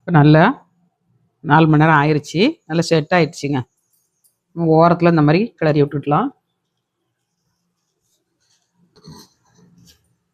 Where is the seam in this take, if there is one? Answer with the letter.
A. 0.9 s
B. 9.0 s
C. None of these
B